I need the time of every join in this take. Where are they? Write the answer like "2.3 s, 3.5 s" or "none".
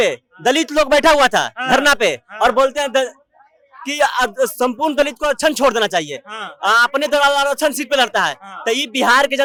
none